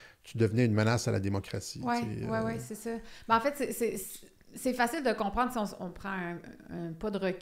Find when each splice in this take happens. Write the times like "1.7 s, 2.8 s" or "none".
none